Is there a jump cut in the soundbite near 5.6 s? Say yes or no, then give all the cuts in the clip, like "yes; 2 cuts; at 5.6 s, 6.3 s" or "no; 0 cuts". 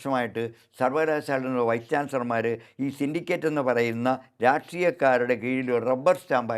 no; 0 cuts